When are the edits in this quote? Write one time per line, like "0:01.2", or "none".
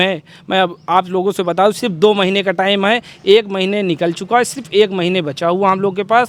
none